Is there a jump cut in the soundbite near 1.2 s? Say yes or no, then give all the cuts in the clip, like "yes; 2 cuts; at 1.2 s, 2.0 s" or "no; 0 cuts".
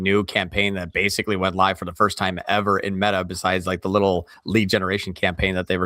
no; 1 cut; at 4.3 s